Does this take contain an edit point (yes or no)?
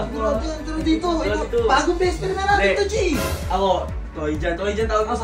no